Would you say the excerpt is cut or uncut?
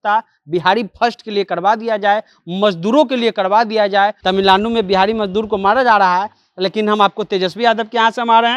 cut